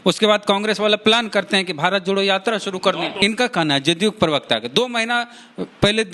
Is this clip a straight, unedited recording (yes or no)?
no